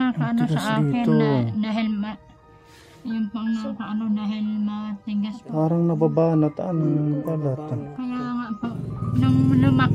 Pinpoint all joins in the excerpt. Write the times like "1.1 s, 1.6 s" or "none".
none

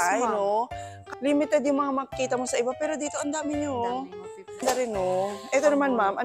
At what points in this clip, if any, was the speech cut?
1.0 s, 4.6 s

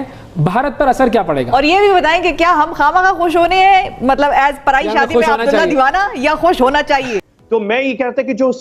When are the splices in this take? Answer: 7.2 s

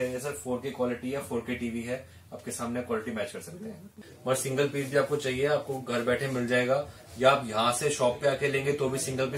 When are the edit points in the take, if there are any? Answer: 4.1 s

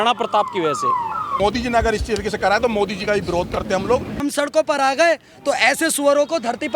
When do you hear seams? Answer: 1.4 s, 4.2 s

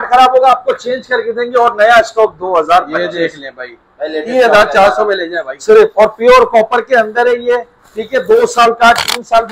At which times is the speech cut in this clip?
none

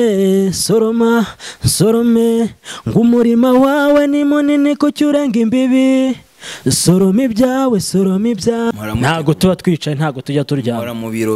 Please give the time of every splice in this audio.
8.7 s

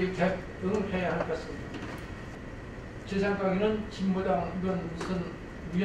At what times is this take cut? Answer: 2.4 s

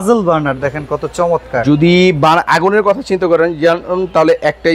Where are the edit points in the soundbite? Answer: none

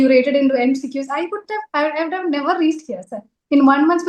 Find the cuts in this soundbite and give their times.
none

